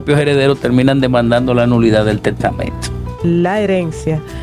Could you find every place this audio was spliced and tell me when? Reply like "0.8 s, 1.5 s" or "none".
3.1 s